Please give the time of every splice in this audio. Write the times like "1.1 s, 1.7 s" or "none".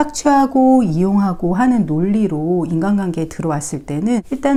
none